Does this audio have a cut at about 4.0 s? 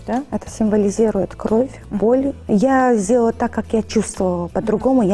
no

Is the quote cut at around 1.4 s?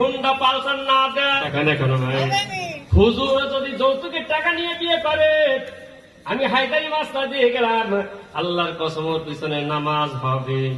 yes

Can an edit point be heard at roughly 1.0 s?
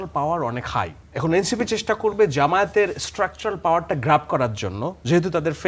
yes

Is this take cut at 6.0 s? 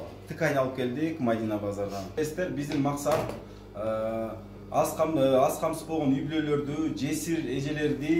no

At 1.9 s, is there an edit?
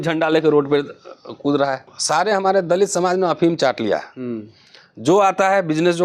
yes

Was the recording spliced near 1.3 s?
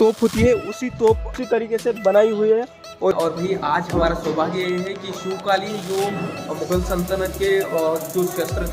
yes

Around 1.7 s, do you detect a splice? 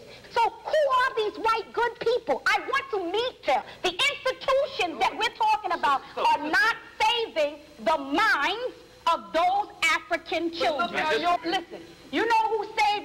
no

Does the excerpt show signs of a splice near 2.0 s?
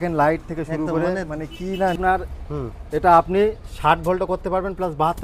yes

